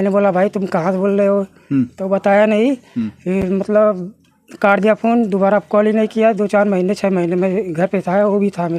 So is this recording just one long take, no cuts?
yes; 0 cuts

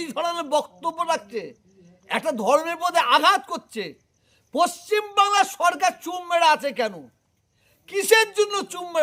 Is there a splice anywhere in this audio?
no; 0 cuts

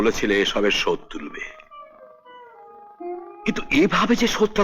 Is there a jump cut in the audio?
no; 0 cuts

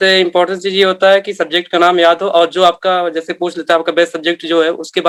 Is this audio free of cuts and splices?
yes; 0 cuts

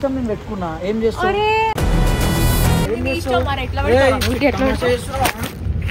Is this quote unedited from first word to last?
no; 1 cut; at 2.9 s

